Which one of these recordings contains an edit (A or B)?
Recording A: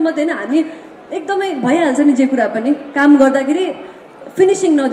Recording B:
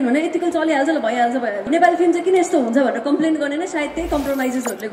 B